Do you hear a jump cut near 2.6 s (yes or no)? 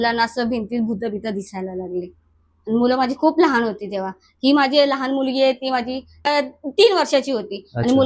no